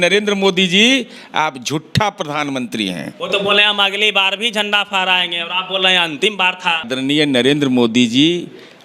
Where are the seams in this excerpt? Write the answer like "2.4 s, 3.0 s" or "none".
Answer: 3.1 s, 6.9 s